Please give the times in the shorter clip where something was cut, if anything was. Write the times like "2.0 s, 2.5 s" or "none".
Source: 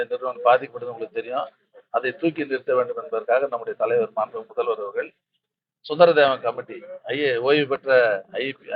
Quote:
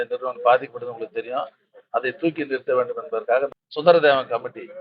3.6 s